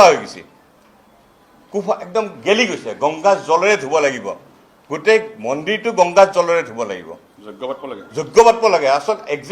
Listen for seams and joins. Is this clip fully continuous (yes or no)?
yes